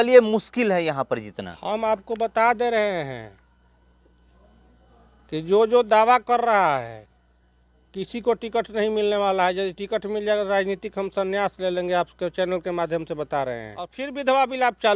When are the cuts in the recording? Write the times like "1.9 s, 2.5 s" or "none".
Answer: none

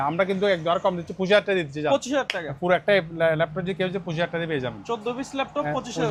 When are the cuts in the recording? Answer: none

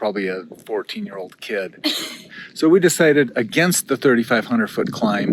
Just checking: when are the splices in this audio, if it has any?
2.2 s

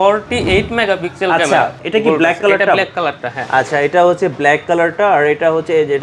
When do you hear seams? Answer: 1.8 s

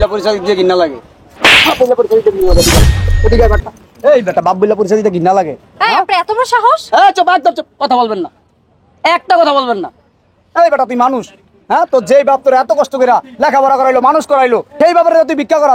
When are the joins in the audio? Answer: 14.7 s

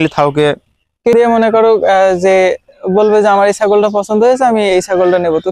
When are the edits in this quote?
1.1 s

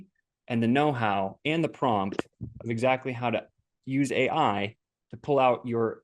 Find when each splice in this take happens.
none

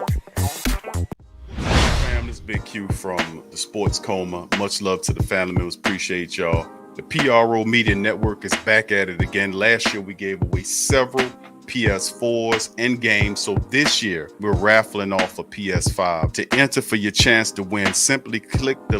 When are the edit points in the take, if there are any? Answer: 1.1 s, 2.1 s

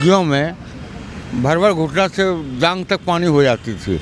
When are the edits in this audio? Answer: none

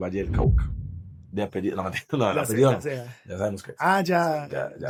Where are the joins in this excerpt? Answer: none

